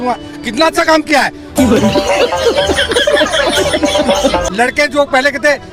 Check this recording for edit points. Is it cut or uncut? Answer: uncut